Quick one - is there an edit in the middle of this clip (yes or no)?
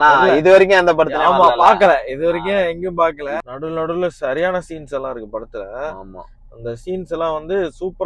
yes